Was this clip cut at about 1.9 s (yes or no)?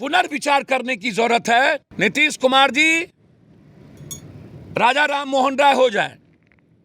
yes